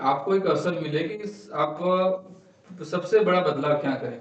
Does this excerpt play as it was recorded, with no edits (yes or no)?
yes